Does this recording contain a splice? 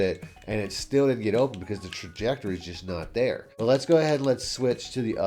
yes; 1 cut; at 3.5 s

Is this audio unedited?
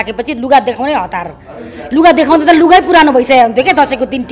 yes; 0 cuts

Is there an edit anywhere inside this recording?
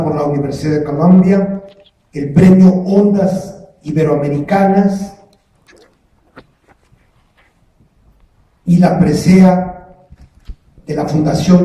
yes; 1 cut; at 3.6 s

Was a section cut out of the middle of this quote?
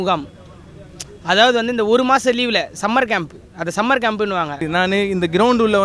yes; 1 cut; at 4.7 s

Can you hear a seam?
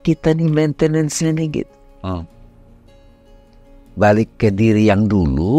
no; 0 cuts

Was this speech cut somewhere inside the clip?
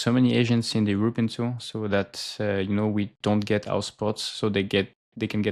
no; 0 cuts

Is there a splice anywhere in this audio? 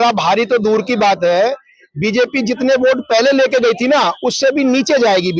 no; 0 cuts

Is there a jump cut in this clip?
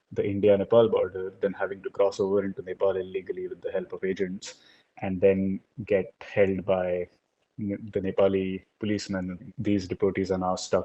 yes; 1 cut; at 9.5 s

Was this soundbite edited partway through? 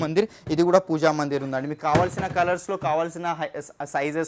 no; 0 cuts

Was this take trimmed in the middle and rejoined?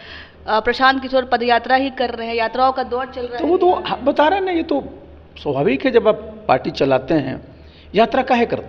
no; 0 cuts

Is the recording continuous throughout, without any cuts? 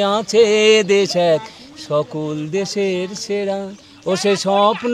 yes; 0 cuts

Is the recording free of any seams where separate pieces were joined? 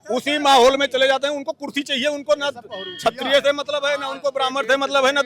yes; 0 cuts

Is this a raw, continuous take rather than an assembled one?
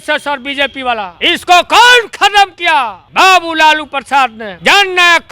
no; 3 cuts; at 1.1 s, 3.0 s, 4.5 s

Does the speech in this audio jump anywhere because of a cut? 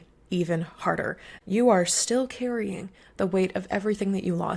yes; 1 cut; at 1.3 s

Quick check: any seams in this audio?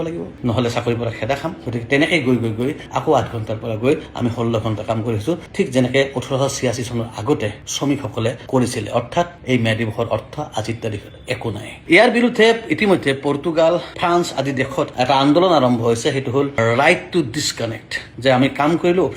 yes; 1 cut; at 11.7 s

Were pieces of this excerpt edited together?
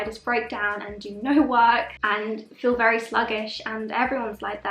no; 0 cuts

